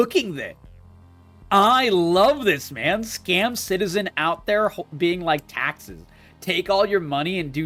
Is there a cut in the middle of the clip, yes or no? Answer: no